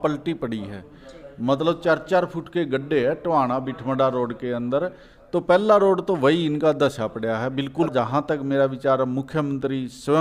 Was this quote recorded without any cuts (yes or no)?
no